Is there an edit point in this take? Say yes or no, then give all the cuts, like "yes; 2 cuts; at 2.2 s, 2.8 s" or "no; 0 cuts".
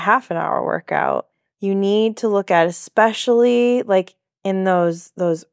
yes; 1 cut; at 1.4 s